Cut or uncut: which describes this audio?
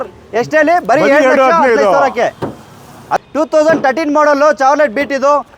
cut